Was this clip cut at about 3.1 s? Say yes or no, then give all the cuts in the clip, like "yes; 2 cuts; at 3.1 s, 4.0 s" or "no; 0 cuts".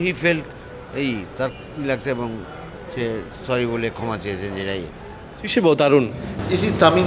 no; 1 cut; at 5.4 s